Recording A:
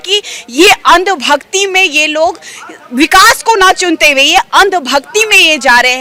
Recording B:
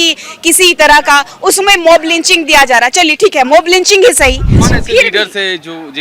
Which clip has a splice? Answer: B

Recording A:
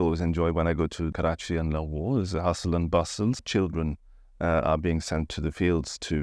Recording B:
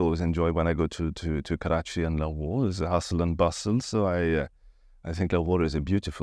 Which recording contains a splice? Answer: A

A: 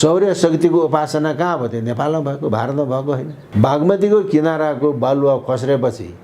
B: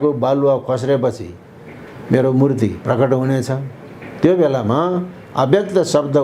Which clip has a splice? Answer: A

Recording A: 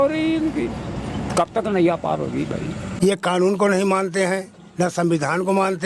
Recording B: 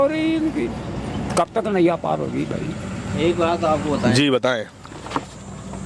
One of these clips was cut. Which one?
A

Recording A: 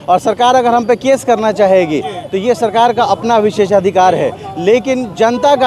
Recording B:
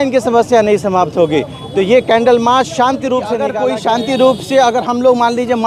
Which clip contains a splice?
B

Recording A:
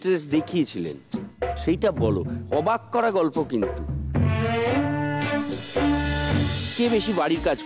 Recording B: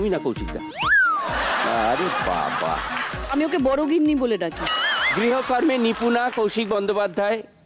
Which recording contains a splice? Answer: A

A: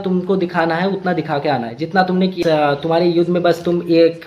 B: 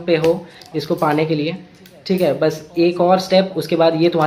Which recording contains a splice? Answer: A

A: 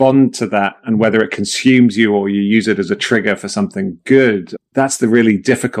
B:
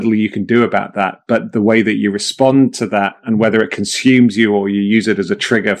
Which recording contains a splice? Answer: A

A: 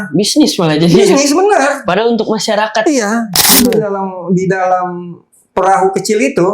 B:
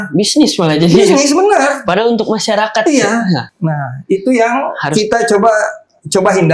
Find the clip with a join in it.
A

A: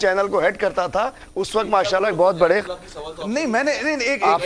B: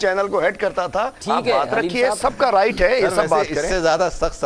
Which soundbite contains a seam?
B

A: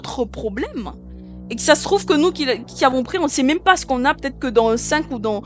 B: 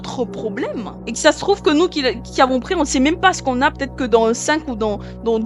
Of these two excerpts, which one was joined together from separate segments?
B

